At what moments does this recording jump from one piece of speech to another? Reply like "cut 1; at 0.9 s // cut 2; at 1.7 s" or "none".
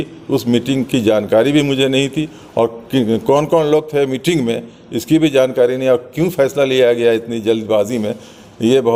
none

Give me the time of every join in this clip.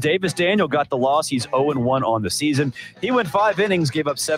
none

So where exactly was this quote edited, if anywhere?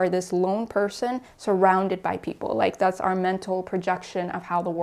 none

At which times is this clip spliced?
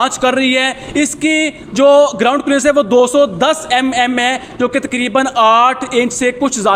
none

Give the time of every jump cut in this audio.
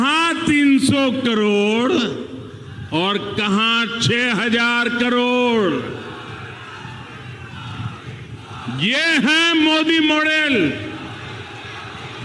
none

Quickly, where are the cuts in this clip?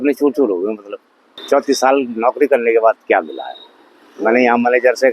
cut 1; at 1.3 s

